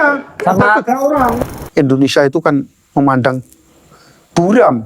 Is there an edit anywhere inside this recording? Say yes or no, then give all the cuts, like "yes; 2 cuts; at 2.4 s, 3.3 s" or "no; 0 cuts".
yes; 1 cut; at 1.4 s